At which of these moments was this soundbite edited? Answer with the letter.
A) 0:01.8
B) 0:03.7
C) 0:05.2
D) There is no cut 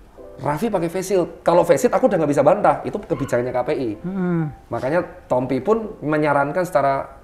D